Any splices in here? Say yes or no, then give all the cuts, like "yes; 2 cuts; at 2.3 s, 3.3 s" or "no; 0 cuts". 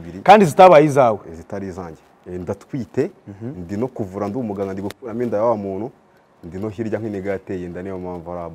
yes; 1 cut; at 2.2 s